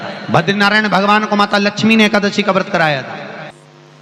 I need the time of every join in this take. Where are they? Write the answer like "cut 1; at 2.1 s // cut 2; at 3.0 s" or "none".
none